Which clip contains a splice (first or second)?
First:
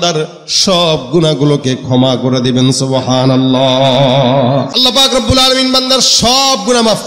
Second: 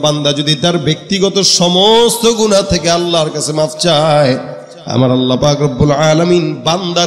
first